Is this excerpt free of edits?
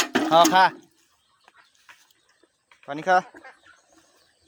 yes; 0 cuts

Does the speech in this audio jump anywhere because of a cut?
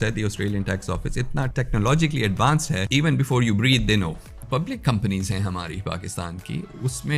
yes; 3 cuts; at 1.5 s, 2.8 s, 4.4 s

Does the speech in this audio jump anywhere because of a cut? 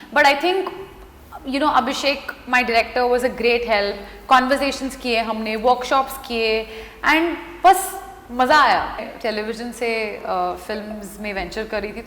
yes; 1 cut; at 9.1 s

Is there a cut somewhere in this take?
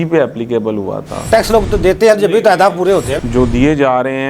yes; 2 cuts; at 1.2 s, 3.1 s

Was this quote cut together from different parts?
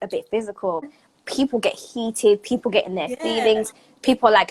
yes; 1 cut; at 0.9 s

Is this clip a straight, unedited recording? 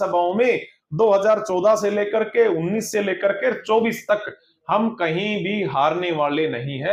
yes; 0 cuts

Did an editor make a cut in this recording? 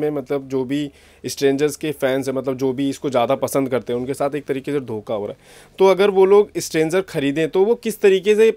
no; 0 cuts

